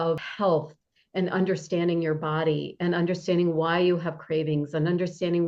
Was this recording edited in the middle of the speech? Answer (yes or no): no